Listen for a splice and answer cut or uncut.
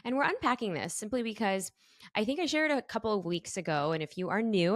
uncut